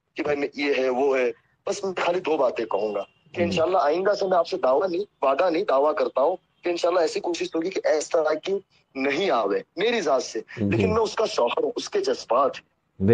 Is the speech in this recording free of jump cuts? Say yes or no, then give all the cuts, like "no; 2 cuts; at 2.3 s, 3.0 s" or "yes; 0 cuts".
yes; 0 cuts